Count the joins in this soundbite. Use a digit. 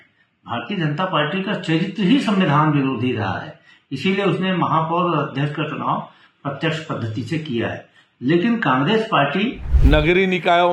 1